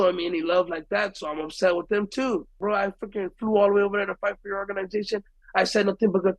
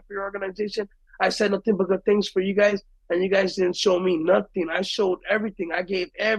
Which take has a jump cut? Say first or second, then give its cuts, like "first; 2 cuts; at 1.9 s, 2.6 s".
first; 1 cut; at 2.6 s